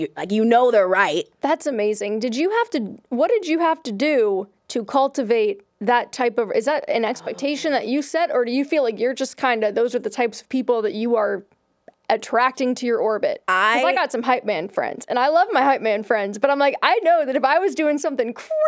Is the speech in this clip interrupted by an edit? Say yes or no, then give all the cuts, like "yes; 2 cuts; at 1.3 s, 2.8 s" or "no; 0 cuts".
yes; 2 cuts; at 1.3 s, 13.4 s